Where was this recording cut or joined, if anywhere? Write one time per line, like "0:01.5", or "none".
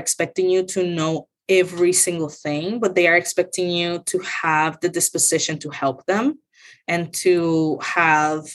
none